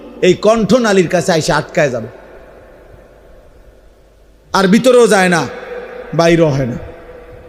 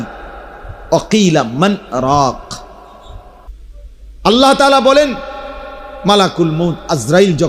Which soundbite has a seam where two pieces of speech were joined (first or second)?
second